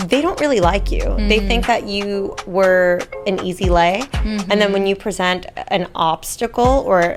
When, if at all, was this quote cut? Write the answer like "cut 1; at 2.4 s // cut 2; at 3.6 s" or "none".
none